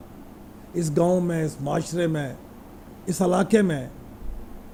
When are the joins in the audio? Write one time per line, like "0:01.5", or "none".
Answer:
none